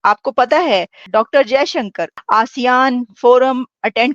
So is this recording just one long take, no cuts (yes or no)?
no